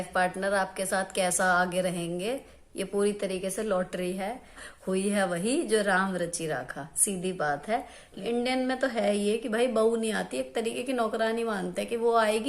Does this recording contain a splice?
yes; 2 cuts; at 4.6 s, 8.1 s

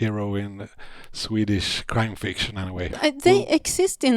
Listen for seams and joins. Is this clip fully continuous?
no; 1 cut; at 2.9 s

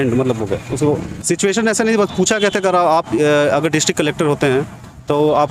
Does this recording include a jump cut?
yes; 1 cut; at 1.2 s

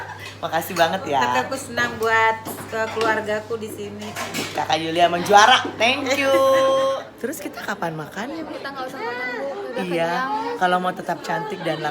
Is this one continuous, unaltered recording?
no; 1 cut; at 7.1 s

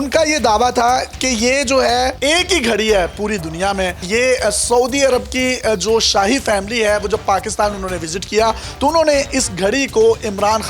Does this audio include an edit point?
yes; 1 cut; at 2.2 s

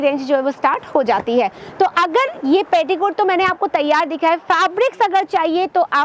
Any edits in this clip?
no; 0 cuts

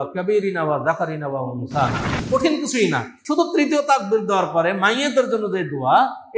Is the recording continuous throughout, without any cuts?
no; 2 cuts; at 2.1 s, 3.1 s

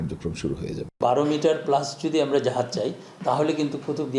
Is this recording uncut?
no; 1 cut; at 1.0 s

